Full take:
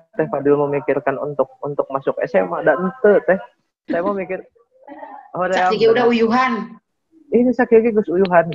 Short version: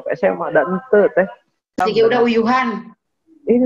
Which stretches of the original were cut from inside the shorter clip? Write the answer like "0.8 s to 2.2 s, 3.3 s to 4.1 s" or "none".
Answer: 3.9 s to 5.6 s

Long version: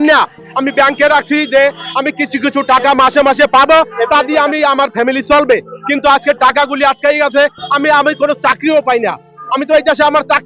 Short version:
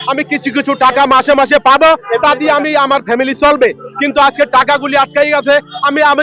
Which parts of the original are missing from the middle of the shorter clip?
none

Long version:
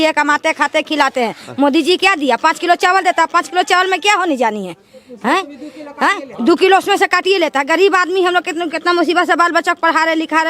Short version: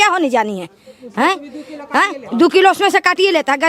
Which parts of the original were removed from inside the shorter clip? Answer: none

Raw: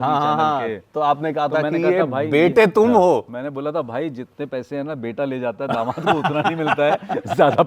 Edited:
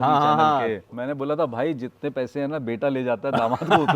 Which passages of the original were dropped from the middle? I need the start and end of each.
0.9 s to 3.3 s

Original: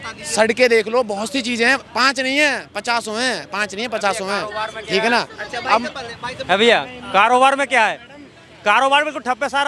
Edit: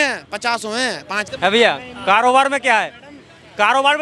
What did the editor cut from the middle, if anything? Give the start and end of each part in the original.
3.6 s to 6.3 s

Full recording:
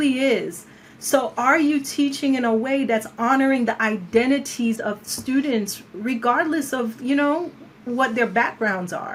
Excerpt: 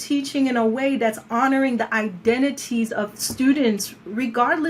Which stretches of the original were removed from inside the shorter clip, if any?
none

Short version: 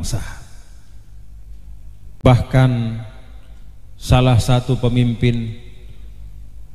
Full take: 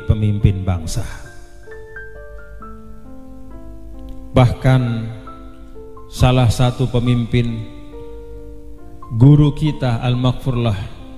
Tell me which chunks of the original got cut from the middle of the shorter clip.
3.0 s to 4.3 s

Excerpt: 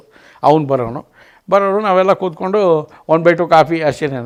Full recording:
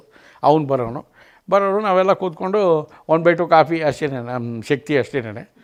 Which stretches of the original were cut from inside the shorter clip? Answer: none

